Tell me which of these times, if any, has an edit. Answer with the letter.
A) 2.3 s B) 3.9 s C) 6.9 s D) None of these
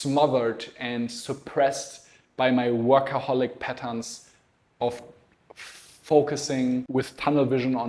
C